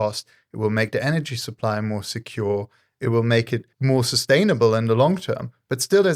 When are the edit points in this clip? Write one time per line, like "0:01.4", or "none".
0:03.7